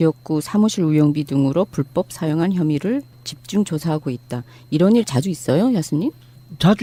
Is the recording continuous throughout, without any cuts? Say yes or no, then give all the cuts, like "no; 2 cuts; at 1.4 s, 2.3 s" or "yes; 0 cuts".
yes; 0 cuts